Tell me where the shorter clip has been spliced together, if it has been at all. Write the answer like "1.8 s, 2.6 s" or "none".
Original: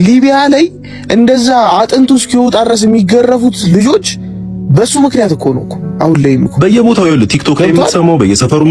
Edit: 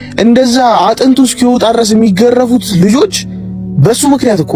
none